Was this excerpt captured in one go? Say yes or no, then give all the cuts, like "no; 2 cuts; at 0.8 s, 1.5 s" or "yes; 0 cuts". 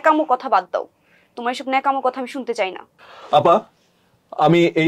no; 1 cut; at 3.0 s